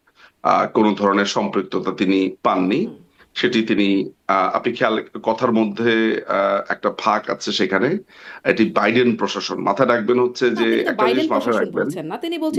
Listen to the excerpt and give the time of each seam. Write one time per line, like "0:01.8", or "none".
none